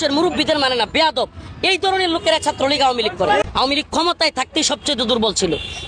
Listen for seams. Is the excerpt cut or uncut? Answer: cut